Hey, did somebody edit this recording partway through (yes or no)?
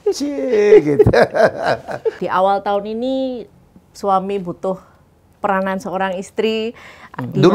yes